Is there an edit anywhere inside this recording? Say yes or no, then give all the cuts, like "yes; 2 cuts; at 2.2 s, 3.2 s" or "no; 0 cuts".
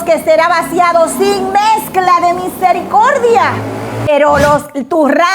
yes; 1 cut; at 4.1 s